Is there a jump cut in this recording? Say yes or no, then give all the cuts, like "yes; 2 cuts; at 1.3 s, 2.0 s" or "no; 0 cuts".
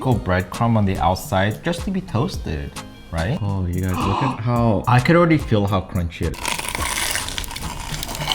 yes; 2 cuts; at 3.4 s, 6.2 s